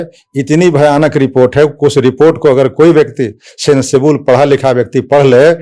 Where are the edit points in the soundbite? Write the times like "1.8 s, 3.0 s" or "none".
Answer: none